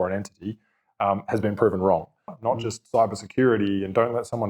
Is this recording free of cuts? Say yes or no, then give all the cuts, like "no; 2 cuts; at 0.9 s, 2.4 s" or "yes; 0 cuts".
no; 1 cut; at 2.4 s